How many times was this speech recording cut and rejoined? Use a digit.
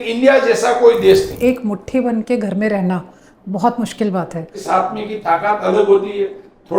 2